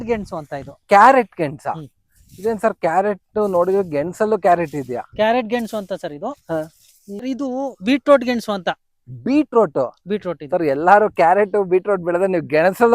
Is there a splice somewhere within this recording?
yes; 1 cut; at 7.1 s

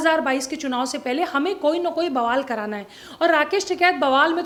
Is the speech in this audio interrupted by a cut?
no; 0 cuts

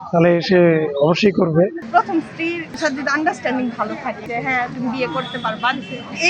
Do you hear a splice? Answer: yes; 3 cuts; at 1.8 s, 2.8 s, 4.3 s

